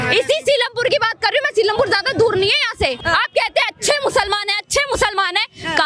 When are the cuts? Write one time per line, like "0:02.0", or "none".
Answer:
0:03.0